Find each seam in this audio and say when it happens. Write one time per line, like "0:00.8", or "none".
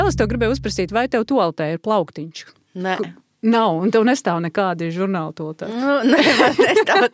none